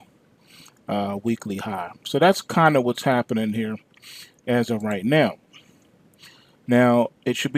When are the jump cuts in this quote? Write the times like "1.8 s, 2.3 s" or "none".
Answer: none